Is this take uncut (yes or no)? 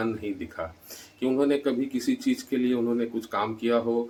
yes